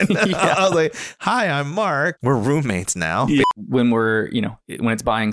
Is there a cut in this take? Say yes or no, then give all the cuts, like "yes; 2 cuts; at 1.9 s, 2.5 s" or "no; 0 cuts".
yes; 2 cuts; at 2.2 s, 3.4 s